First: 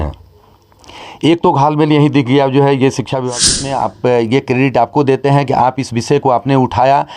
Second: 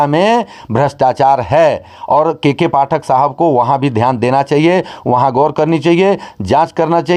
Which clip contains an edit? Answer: first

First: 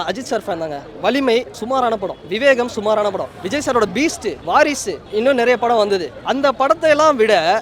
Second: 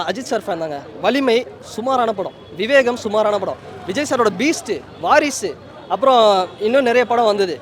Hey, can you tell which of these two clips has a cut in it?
first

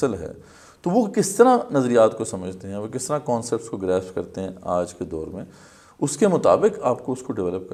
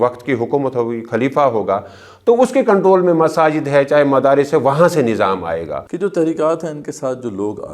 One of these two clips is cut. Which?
second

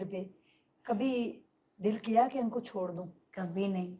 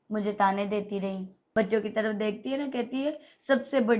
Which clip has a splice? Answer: second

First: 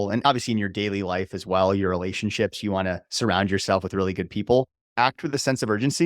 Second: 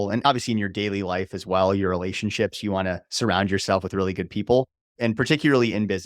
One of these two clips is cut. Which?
first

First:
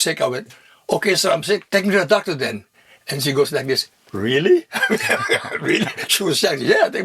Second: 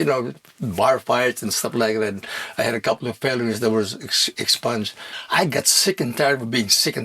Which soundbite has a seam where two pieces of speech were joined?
second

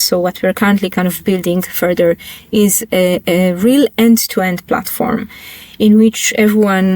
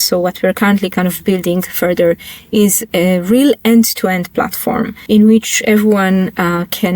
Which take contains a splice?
second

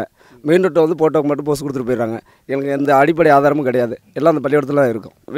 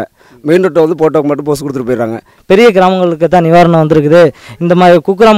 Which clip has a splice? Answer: second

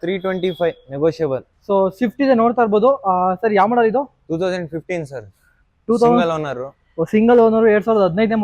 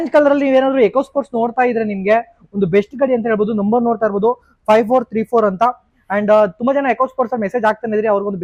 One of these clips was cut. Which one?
first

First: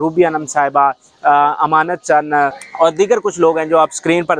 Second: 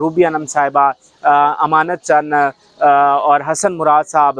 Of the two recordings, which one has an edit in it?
first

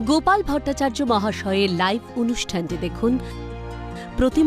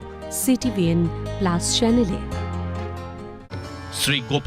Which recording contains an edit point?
second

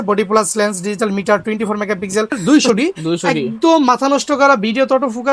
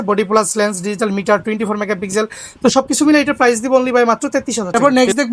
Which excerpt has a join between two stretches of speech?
first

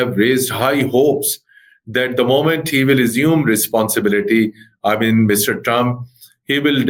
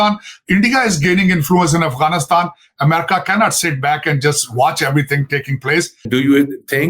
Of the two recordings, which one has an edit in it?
second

